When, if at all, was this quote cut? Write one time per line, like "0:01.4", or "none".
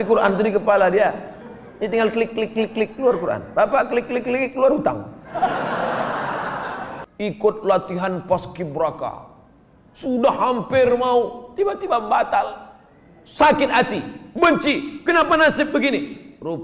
0:07.0